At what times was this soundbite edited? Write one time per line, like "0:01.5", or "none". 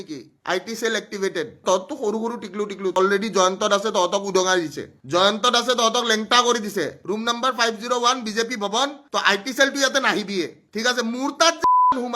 0:01.6
0:02.9
0:07.0
0:09.0
0:10.6